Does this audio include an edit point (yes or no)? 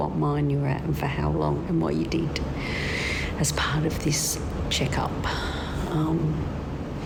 no